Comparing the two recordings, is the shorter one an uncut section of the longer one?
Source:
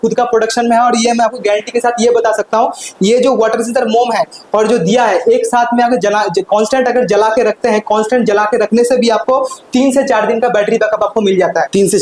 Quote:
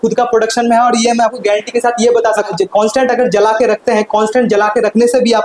no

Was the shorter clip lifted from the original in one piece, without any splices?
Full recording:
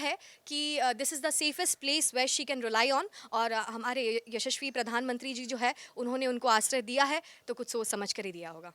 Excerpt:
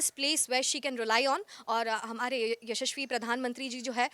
yes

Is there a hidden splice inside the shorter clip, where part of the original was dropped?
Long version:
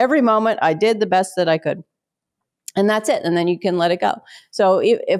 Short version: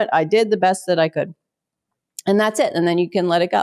no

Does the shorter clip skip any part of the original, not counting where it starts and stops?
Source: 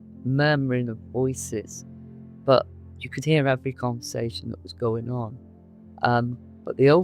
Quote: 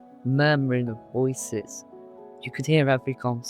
yes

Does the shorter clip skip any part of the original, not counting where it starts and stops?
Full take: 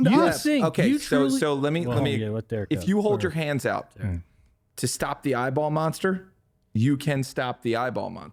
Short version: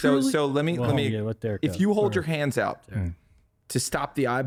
no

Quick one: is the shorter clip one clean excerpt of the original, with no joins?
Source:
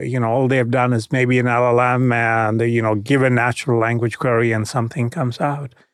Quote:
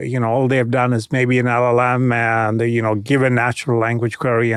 yes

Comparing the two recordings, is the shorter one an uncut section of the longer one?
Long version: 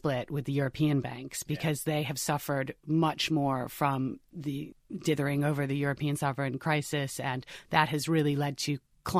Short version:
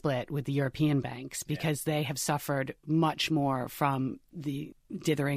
yes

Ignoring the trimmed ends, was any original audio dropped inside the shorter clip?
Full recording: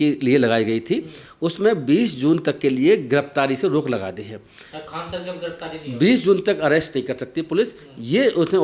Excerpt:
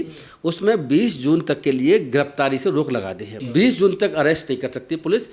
yes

